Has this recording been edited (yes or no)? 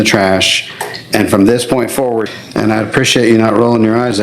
yes